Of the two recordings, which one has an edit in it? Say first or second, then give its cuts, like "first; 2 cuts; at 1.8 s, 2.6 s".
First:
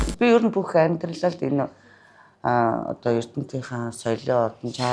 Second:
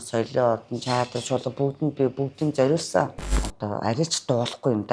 second; 1 cut; at 3.2 s